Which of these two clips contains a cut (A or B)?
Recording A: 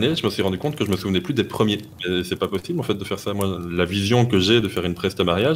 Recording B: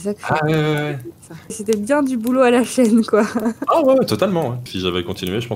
B